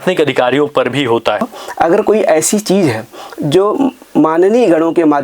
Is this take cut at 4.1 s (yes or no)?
no